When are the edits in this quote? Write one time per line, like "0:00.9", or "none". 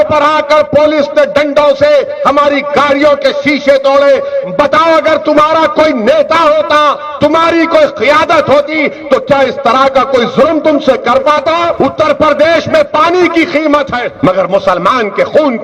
0:11.7
0:14.0